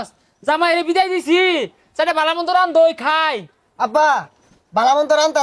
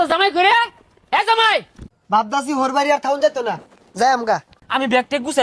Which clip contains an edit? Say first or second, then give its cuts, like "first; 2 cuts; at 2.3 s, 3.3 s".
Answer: second; 2 cuts; at 1.8 s, 4.5 s